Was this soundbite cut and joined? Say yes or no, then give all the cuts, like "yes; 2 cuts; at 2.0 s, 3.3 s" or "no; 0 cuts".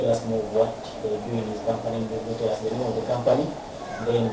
no; 0 cuts